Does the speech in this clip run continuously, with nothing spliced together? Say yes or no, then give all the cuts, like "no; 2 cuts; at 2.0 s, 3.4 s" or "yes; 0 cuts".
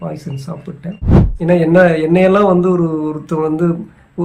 no; 1 cut; at 1.2 s